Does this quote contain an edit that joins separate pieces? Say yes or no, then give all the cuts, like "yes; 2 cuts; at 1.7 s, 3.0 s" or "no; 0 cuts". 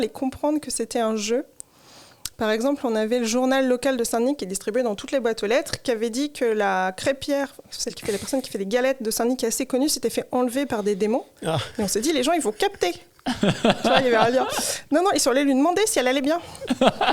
no; 0 cuts